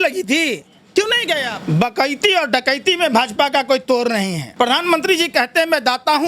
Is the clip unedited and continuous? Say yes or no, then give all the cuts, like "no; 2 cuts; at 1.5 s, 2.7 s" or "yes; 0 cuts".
no; 2 cuts; at 1.5 s, 4.4 s